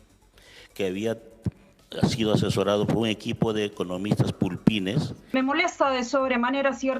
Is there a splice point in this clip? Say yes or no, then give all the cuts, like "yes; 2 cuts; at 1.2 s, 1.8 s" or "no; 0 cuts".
yes; 1 cut; at 5.2 s